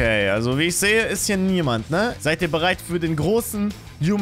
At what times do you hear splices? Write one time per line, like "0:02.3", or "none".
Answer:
0:02.1